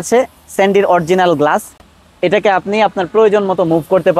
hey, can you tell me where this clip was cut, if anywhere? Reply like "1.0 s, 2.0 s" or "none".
none

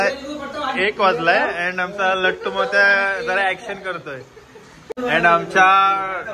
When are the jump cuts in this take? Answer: 5.0 s

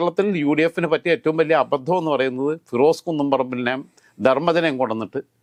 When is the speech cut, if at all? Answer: none

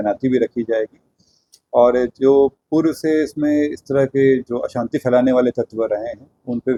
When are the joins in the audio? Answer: none

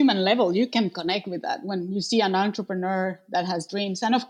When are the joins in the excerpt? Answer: none

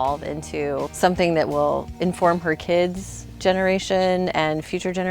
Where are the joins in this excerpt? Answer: 0.9 s, 1.9 s

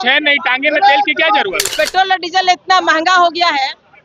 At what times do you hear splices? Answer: 1.7 s

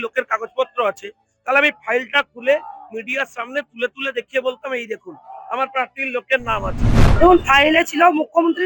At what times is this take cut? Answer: 7.0 s

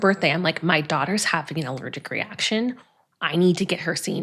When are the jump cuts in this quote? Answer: none

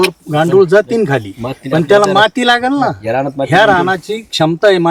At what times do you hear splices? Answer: none

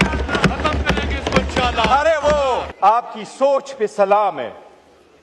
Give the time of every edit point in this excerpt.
2.7 s

